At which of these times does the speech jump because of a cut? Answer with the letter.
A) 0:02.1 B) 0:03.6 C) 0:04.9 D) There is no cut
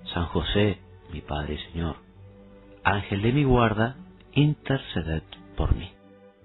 C